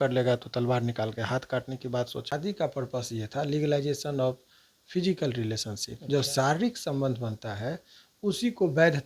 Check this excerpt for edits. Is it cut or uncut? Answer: cut